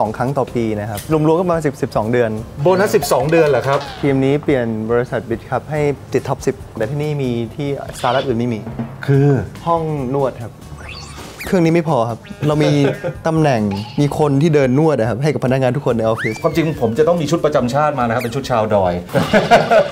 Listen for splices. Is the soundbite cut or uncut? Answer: cut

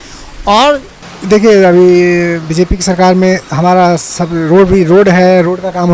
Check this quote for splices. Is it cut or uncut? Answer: cut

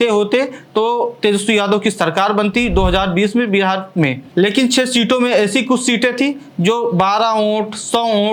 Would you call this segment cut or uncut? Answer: uncut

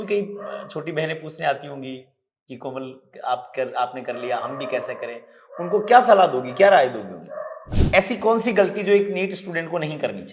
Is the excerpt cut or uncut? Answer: cut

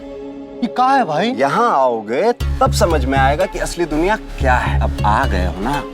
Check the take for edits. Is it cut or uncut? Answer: cut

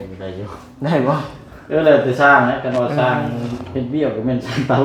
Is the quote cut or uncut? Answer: uncut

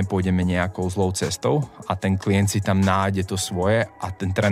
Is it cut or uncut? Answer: uncut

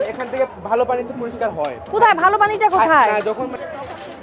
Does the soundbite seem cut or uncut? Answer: uncut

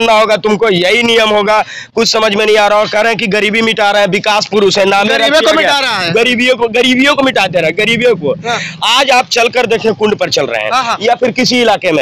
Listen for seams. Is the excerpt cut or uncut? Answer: uncut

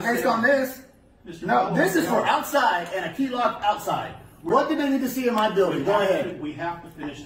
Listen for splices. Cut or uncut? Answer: uncut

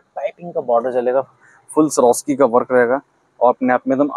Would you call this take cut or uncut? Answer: uncut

